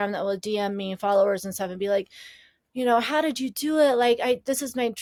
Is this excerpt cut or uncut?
uncut